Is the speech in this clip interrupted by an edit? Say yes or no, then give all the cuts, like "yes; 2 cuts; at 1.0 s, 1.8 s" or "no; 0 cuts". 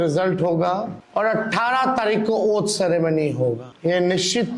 yes; 2 cuts; at 1.0 s, 3.7 s